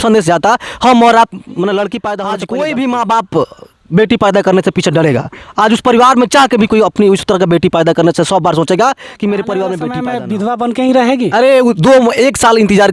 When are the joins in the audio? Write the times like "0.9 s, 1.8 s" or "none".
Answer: 2.0 s, 10.1 s